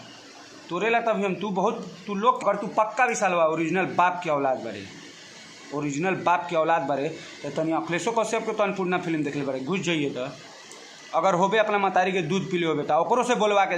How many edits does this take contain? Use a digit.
1